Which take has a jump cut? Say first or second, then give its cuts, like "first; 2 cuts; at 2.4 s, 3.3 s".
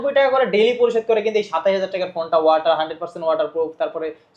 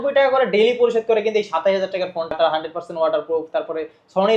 second; 1 cut; at 2.3 s